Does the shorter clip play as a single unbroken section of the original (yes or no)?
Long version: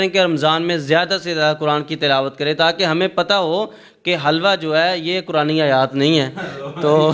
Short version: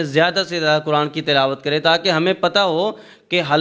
yes